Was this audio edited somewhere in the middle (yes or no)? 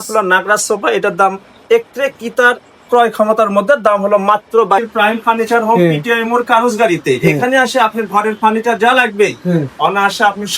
yes